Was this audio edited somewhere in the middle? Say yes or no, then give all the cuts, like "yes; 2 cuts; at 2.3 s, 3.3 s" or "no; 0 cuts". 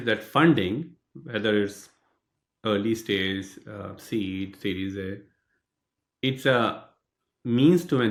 no; 0 cuts